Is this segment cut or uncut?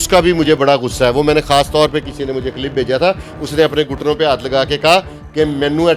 uncut